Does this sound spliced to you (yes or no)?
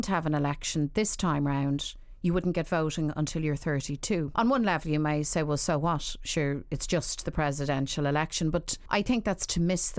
yes